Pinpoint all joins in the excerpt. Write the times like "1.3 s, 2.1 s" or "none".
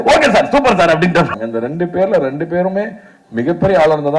1.3 s